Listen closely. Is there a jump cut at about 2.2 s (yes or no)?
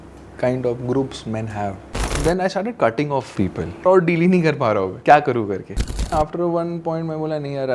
yes